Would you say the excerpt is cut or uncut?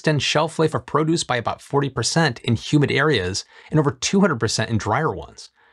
uncut